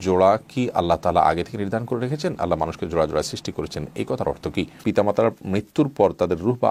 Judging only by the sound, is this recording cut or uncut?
cut